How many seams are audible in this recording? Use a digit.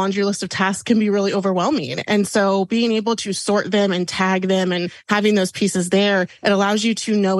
2